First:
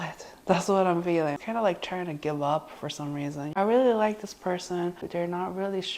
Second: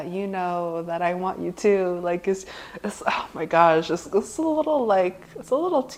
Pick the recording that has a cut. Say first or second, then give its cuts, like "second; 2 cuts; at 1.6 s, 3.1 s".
first; 3 cuts; at 1.4 s, 3.5 s, 5.0 s